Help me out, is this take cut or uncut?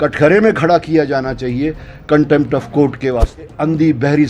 cut